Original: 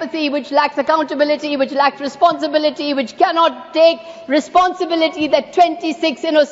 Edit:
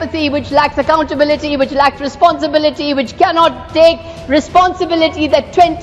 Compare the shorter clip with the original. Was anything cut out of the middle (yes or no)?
no